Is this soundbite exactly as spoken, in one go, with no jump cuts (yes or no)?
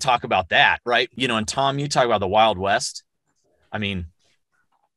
no